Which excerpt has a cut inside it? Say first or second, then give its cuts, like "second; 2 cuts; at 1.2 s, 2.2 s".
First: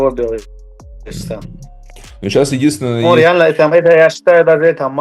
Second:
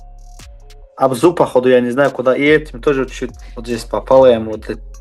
second; 1 cut; at 0.9 s